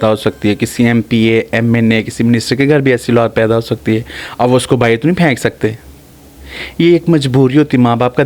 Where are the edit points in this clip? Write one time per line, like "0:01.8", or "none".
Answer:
none